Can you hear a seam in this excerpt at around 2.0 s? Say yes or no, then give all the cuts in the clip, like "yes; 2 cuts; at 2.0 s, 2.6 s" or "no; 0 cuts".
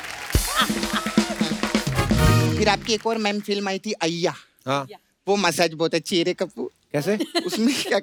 no; 0 cuts